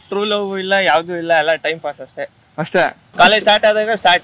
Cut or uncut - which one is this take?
cut